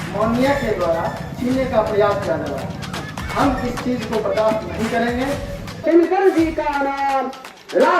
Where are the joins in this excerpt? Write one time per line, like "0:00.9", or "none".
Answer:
0:05.8